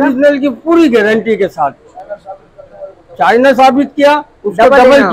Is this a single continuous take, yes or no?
yes